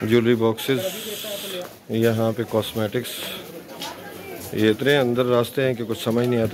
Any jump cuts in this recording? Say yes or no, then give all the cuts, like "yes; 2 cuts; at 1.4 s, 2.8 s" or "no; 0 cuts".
no; 0 cuts